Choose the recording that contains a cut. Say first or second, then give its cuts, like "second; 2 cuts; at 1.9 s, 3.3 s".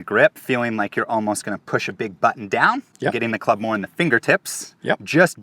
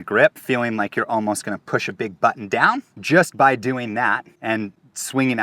second; 2 cuts; at 3.0 s, 4.6 s